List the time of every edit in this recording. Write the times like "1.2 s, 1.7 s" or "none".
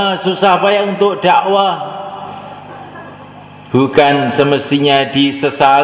3.5 s